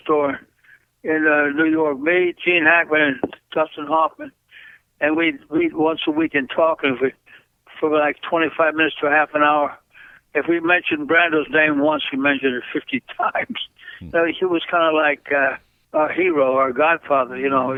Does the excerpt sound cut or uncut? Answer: uncut